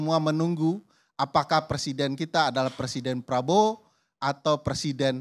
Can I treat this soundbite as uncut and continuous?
yes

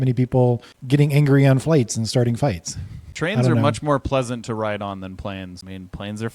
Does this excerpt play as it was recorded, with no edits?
no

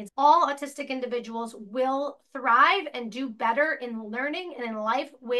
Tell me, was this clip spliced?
no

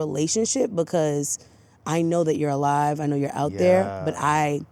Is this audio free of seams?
yes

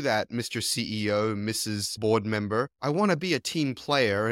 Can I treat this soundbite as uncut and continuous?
no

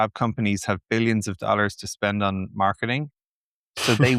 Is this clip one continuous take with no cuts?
yes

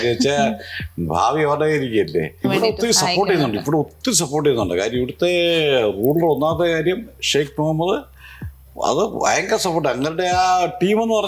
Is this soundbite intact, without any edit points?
no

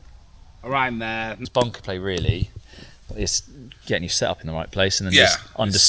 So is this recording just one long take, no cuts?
no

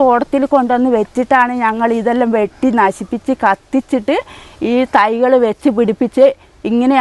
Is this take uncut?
yes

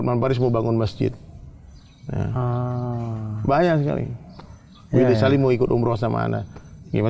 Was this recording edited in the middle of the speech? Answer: no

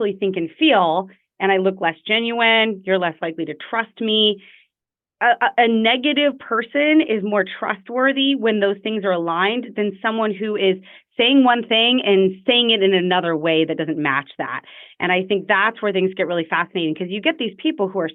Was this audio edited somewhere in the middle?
no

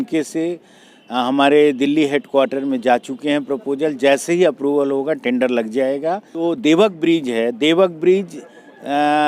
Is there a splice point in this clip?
yes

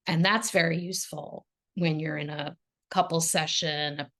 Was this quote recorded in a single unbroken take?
no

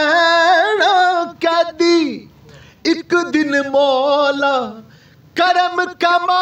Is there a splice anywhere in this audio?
no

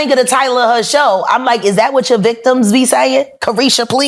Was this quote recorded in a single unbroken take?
yes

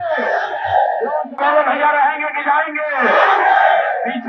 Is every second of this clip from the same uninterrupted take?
yes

